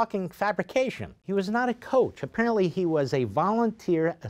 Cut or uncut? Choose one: cut